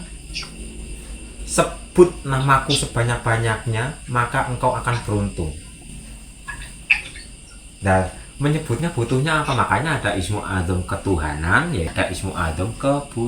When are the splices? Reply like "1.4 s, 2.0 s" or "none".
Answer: 11.9 s

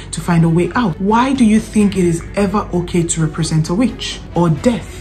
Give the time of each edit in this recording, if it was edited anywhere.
1.0 s

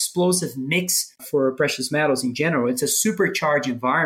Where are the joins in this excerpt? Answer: 1.2 s

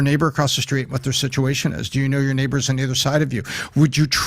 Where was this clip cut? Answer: 3.4 s

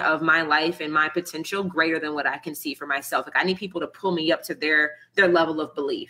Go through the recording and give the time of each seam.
none

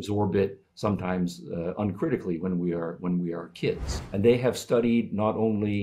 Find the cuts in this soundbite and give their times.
3.9 s

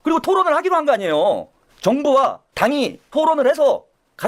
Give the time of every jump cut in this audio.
1.7 s, 2.4 s

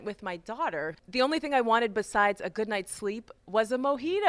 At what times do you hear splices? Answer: 1.0 s

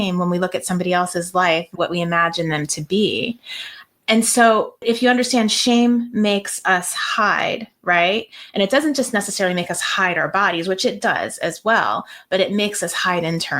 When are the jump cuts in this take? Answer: 4.8 s

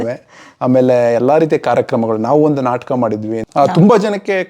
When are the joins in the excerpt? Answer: 3.3 s

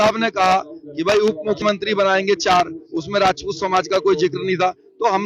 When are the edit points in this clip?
1.6 s

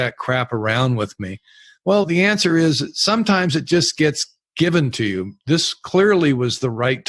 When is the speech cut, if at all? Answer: none

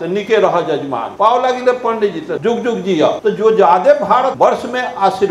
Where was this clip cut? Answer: 1.0 s, 2.4 s, 3.2 s, 4.3 s

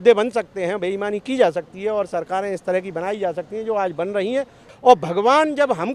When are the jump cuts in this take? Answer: 4.7 s

